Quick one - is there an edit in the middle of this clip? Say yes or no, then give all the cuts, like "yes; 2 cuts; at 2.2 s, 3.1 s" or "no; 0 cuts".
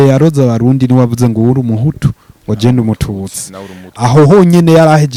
no; 0 cuts